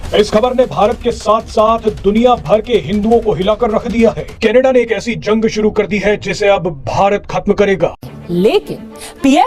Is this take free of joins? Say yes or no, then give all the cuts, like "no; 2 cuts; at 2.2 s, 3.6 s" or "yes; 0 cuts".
no; 1 cut; at 8.0 s